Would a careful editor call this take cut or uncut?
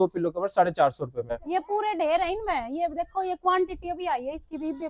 cut